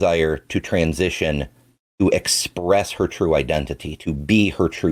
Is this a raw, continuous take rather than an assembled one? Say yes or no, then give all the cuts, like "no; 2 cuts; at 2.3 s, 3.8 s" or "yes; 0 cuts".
yes; 0 cuts